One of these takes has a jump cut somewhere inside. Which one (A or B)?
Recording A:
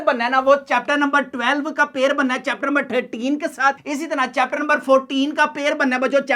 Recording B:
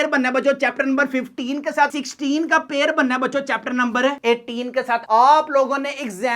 B